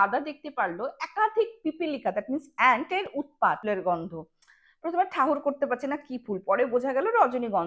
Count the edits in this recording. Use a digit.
1